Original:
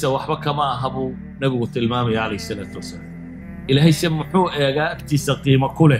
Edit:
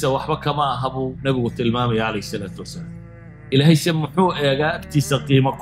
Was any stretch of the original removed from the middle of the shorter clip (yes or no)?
yes